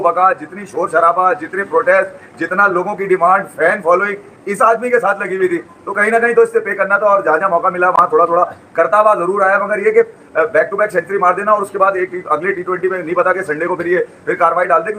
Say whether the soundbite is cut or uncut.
uncut